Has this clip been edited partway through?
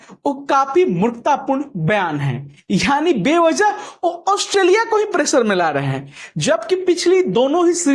no; 0 cuts

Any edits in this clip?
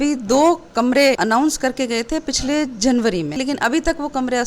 yes; 1 cut; at 3.4 s

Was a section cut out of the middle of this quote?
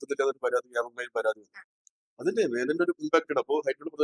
no; 0 cuts

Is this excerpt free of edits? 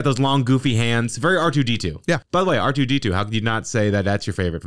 yes; 0 cuts

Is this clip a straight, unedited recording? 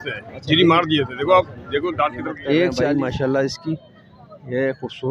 no; 1 cut; at 2.8 s

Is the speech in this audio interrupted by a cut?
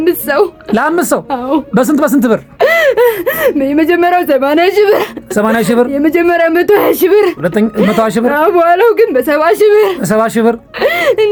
no; 0 cuts

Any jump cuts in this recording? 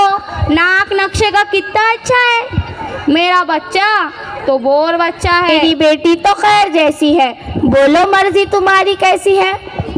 yes; 1 cut; at 5.5 s

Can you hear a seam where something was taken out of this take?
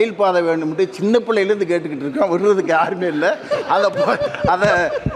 no; 0 cuts

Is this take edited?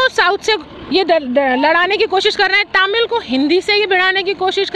no; 0 cuts

